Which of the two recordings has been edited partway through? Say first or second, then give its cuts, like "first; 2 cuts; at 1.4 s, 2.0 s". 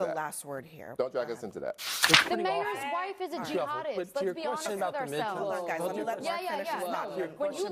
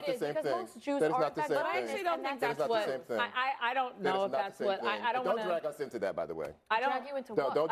first; 1 cut; at 2.0 s